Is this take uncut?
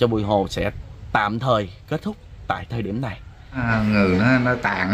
no; 1 cut; at 3.7 s

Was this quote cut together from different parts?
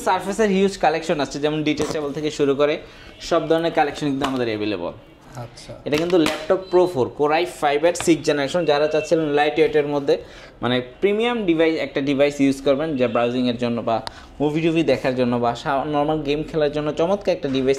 no; 0 cuts

